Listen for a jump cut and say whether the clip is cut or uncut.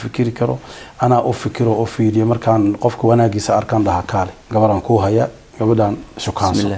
cut